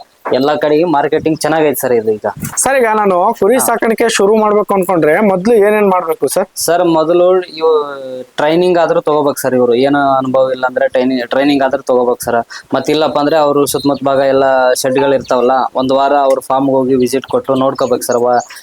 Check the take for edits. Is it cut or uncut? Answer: cut